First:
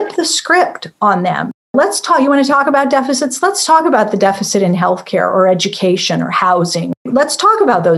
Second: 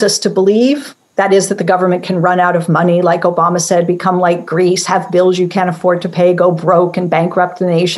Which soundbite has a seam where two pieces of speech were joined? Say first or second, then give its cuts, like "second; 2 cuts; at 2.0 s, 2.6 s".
first; 2 cuts; at 1.7 s, 7.1 s